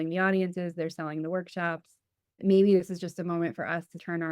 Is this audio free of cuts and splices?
no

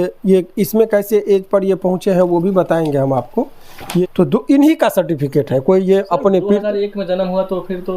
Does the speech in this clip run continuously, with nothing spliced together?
no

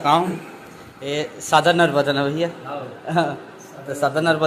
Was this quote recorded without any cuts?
yes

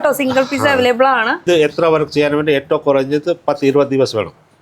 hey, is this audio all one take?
no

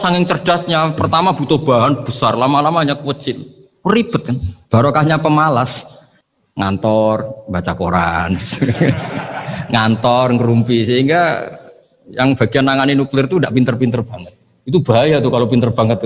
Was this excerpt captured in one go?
yes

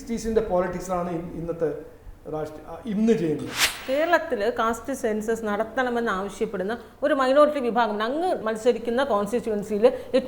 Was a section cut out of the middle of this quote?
yes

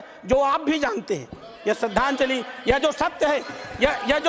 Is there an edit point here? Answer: no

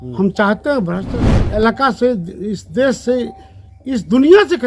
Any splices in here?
yes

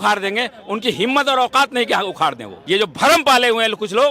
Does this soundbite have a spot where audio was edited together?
yes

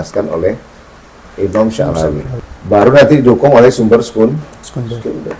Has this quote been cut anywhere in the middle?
yes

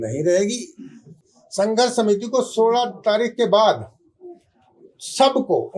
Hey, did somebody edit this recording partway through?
yes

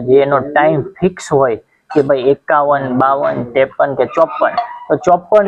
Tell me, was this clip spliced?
no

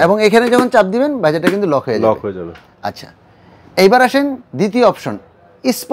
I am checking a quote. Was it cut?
no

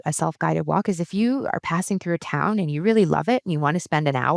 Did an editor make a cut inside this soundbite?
no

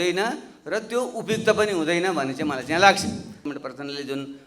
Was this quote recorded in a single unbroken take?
no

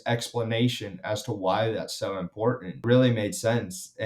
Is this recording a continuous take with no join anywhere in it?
no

